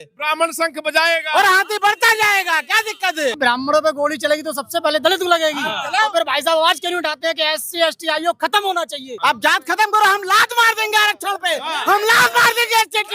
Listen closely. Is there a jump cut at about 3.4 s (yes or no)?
yes